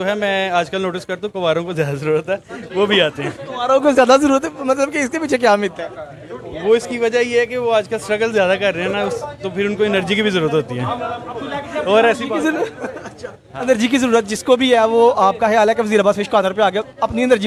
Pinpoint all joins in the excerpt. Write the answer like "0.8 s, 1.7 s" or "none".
none